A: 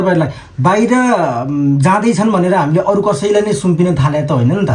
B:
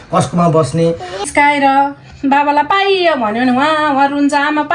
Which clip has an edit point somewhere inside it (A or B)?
B